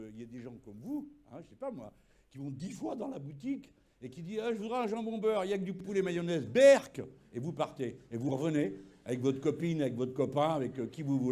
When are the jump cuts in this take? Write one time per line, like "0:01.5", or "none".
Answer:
none